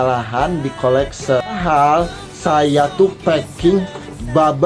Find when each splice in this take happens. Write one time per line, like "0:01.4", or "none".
0:01.5